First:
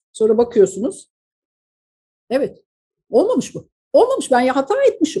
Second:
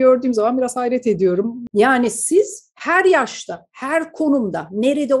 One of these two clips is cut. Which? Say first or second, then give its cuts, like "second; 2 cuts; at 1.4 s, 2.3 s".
second; 1 cut; at 1.6 s